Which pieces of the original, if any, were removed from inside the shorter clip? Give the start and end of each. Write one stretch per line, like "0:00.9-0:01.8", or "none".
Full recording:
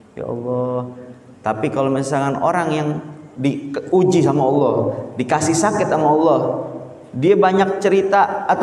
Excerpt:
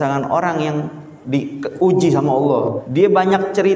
0:04.9-0:07.1